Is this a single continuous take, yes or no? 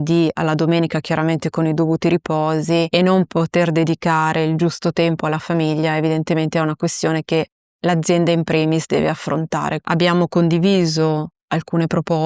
yes